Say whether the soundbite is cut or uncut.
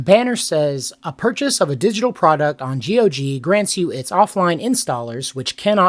uncut